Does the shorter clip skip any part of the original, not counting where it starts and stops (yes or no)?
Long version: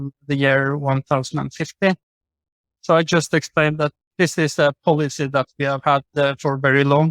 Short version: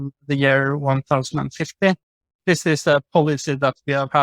yes